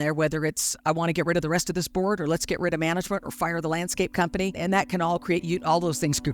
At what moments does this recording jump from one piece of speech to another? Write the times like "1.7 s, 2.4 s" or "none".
4.6 s